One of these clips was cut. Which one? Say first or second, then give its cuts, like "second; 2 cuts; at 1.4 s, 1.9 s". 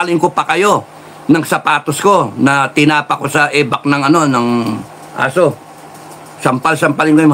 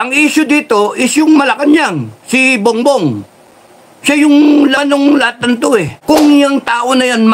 second; 1 cut; at 6.0 s